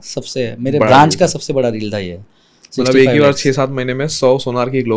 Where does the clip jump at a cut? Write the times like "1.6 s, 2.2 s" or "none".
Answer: none